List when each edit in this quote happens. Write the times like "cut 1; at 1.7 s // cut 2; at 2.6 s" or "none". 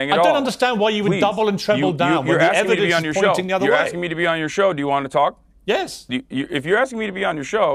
none